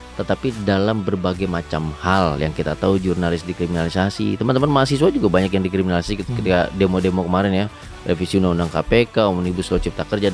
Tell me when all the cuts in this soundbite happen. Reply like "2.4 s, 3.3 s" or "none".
none